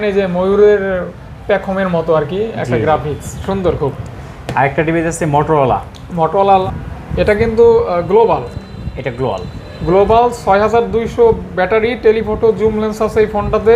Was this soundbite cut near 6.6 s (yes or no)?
yes